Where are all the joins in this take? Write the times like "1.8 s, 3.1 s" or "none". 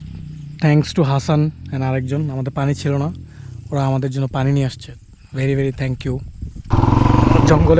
6.7 s